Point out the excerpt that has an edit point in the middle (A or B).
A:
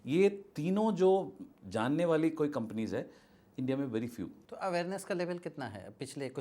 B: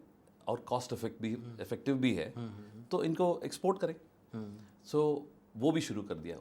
A